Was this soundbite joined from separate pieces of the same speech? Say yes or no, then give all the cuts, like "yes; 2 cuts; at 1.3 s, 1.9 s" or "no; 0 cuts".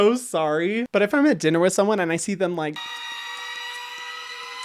no; 0 cuts